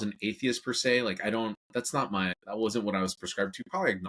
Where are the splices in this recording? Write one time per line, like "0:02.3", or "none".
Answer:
0:02.4